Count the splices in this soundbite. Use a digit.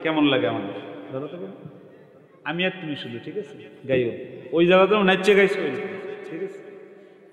0